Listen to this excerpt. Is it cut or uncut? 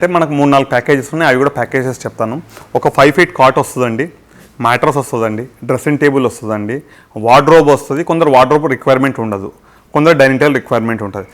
uncut